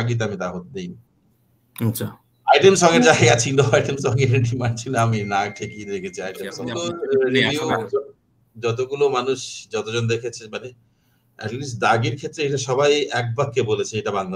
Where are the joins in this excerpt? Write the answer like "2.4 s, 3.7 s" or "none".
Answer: 6.7 s